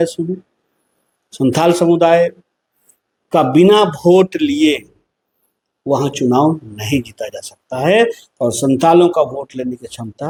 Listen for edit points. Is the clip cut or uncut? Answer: uncut